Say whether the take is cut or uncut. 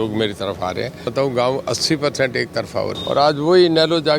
cut